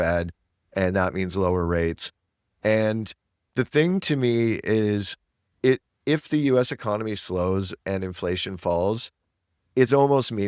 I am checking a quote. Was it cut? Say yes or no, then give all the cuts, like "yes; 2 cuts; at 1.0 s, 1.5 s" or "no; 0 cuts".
no; 0 cuts